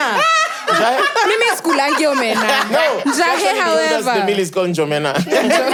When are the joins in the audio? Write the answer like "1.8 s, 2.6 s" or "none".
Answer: none